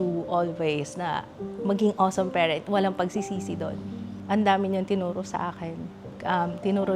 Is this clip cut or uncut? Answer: uncut